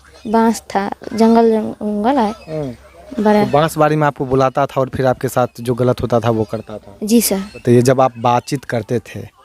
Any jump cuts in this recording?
yes; 1 cut; at 7.6 s

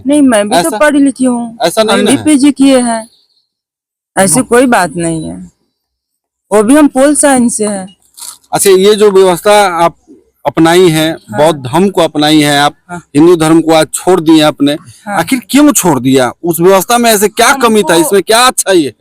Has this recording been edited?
no; 0 cuts

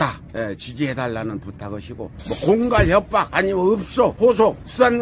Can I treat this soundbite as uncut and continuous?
no; 1 cut; at 2.1 s

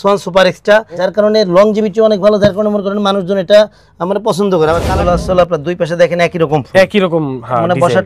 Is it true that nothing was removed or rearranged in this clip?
no; 2 cuts; at 1.0 s, 4.8 s

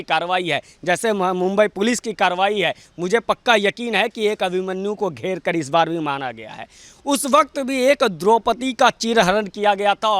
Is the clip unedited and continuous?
yes; 0 cuts

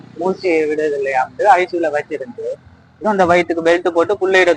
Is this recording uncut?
no; 1 cut; at 3.0 s

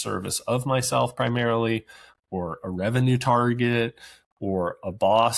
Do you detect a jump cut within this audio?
no; 0 cuts

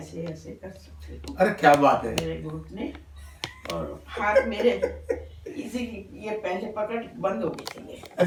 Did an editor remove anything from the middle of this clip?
no; 0 cuts

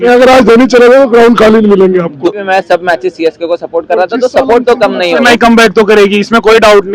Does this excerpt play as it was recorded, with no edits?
no; 2 cuts; at 2.4 s, 5.2 s

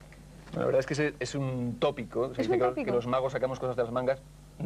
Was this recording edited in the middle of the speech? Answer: no; 0 cuts

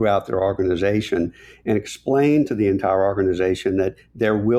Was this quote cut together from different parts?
no; 0 cuts

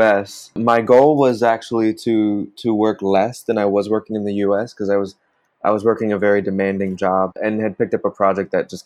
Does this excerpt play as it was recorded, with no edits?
yes; 0 cuts

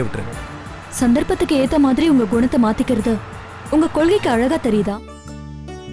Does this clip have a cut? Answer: yes; 1 cut; at 4.9 s

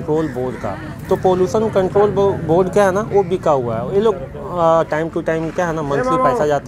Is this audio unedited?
yes; 0 cuts

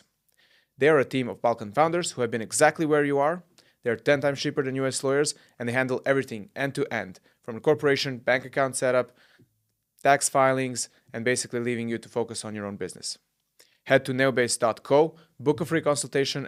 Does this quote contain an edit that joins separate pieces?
no; 0 cuts

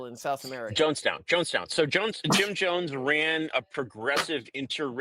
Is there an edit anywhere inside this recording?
no; 0 cuts

